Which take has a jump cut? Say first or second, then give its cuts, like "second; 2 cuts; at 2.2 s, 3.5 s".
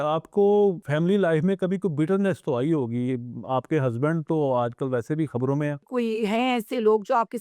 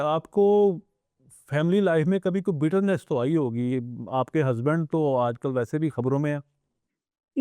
first; 2 cuts; at 0.8 s, 5.9 s